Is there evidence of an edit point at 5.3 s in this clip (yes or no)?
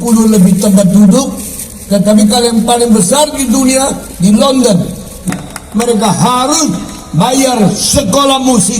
yes